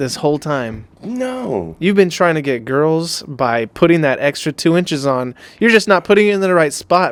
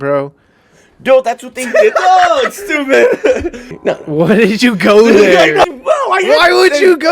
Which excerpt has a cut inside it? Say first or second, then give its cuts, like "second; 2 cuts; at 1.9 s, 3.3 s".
second; 2 cuts; at 3.6 s, 5.7 s